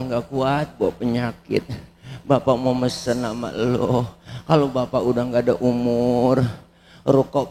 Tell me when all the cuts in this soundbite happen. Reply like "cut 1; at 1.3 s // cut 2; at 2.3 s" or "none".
none

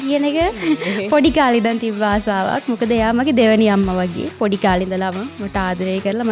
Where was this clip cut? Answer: none

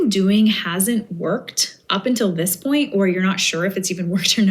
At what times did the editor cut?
none

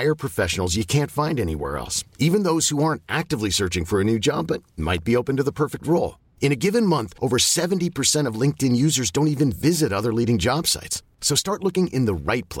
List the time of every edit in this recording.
none

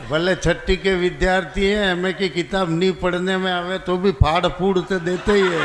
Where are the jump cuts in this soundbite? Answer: none

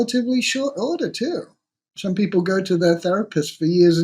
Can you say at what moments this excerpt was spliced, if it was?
cut 1; at 2.0 s

